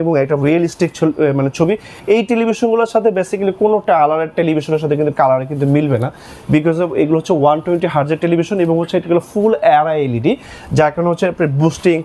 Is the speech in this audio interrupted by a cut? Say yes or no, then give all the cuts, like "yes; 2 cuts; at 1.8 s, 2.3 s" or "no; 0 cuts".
no; 0 cuts